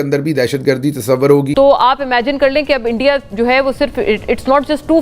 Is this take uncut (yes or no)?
no